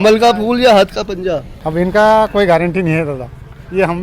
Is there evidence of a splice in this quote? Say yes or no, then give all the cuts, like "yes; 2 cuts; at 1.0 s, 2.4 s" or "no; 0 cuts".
yes; 1 cut; at 1.5 s